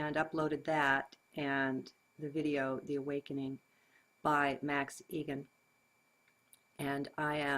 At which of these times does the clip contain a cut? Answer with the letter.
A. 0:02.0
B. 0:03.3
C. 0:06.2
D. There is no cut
A